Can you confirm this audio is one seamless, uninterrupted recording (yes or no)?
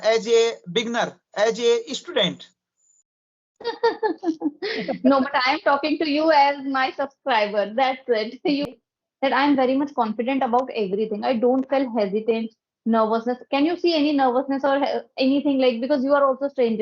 no